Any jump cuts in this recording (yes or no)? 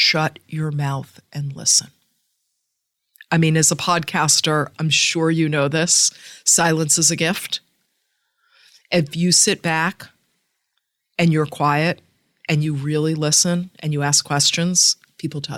no